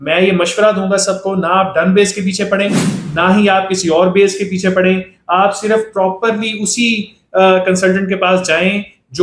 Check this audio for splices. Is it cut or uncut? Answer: uncut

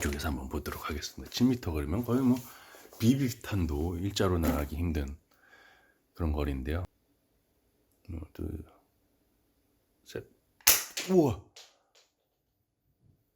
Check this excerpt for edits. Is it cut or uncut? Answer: cut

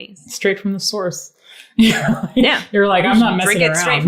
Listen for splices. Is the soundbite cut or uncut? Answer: uncut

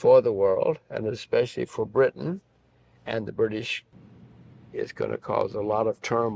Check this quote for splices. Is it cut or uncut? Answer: cut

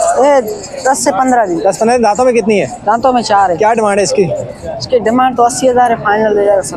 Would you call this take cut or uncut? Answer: uncut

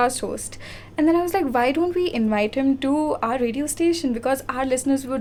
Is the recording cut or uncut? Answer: uncut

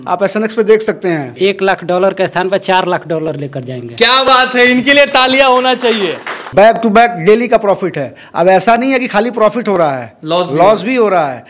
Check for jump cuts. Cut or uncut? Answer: cut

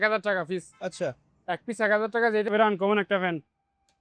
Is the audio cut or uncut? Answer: cut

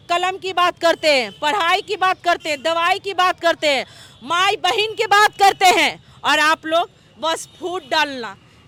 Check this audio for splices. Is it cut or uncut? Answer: uncut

